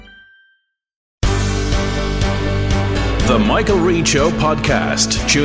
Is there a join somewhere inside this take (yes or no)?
yes